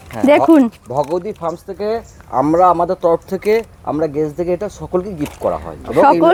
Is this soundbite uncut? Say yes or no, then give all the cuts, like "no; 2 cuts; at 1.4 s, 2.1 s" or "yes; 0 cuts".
yes; 0 cuts